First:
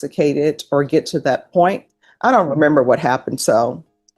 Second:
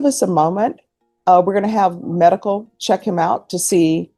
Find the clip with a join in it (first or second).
first